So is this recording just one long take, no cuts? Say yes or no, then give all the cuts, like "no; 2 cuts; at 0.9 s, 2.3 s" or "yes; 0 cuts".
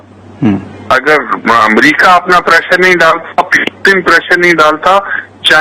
yes; 0 cuts